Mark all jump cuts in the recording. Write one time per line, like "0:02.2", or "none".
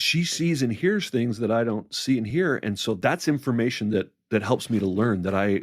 0:04.2